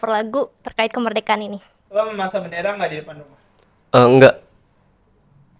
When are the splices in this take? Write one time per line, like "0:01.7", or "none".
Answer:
0:01.8